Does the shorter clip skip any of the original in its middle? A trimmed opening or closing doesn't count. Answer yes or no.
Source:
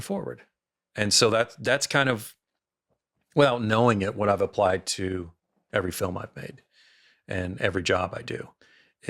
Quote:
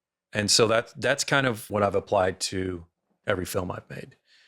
yes